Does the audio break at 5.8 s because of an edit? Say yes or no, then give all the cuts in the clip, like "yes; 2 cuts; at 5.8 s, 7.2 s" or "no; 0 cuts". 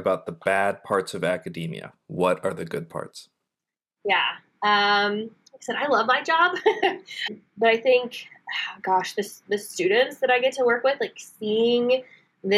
no; 1 cut; at 7.3 s